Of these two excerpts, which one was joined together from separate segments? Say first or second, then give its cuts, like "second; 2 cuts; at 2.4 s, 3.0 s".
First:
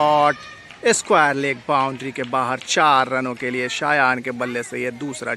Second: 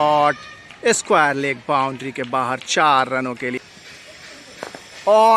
second; 1 cut; at 3.6 s